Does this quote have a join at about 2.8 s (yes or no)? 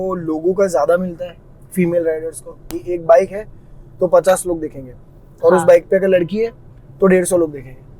yes